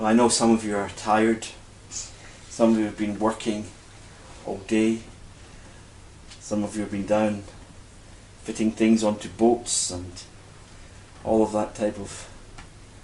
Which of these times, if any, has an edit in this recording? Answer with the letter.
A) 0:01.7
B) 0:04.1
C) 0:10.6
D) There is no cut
D